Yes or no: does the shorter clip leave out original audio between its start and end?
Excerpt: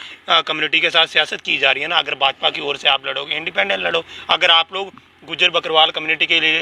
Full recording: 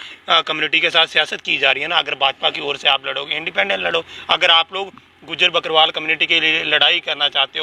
no